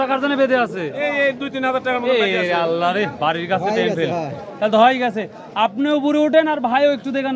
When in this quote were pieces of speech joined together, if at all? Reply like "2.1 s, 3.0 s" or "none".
none